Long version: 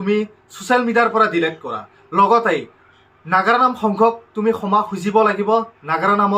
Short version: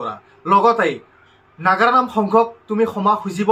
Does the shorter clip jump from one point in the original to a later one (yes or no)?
no